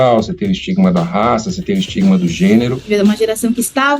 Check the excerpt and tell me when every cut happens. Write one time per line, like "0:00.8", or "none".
0:02.8